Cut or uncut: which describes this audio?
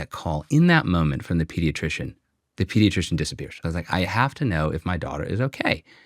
cut